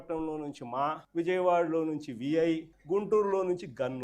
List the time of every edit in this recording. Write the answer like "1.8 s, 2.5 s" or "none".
1.0 s, 2.7 s